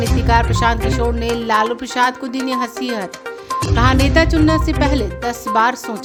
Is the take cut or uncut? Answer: uncut